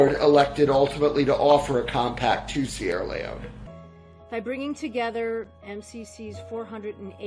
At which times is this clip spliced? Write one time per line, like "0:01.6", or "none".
0:03.6